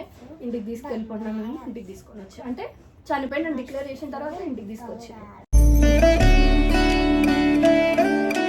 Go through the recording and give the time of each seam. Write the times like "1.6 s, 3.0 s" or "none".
none